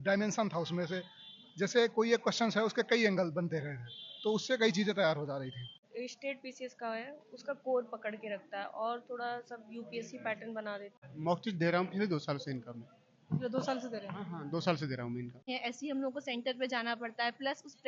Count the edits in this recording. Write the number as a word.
three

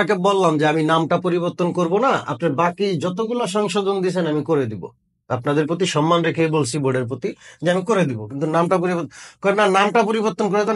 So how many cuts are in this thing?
zero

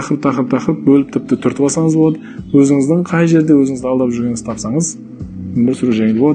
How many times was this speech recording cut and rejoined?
zero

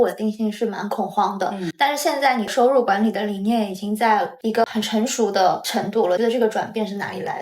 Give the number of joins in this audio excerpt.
three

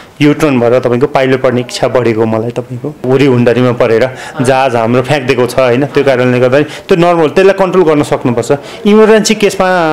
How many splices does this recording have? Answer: one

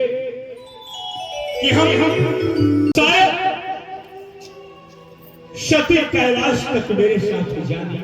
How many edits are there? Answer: one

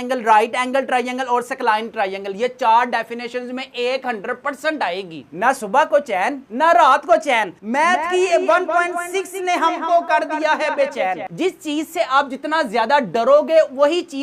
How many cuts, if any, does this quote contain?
two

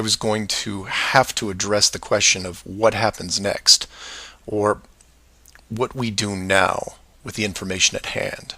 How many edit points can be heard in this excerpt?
one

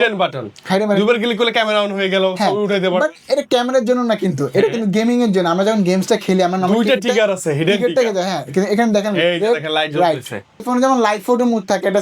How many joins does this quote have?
one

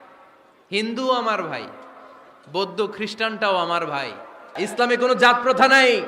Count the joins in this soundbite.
one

